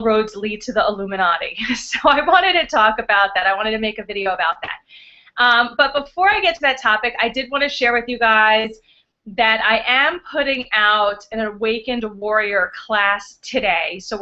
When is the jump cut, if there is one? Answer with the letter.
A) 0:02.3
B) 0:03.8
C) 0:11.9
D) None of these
D